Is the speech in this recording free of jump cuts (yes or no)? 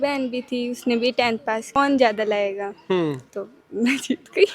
no